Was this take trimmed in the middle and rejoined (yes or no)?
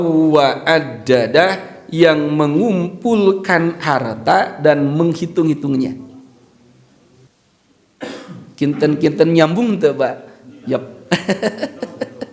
yes